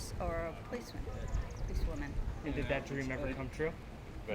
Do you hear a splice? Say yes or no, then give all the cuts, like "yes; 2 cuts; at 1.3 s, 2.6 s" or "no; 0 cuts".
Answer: no; 0 cuts